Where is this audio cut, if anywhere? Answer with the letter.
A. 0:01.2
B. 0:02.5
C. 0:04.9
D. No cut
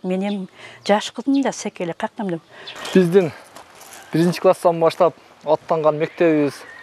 B